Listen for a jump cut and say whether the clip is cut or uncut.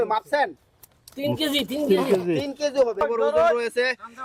cut